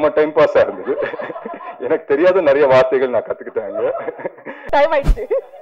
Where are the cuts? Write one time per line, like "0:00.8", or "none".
0:04.5